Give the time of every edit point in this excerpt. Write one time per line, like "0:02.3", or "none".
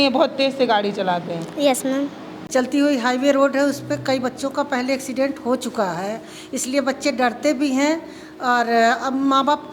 0:02.3